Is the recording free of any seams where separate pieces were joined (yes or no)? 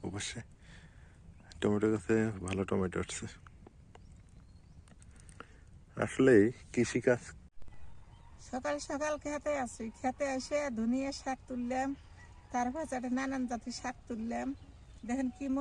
no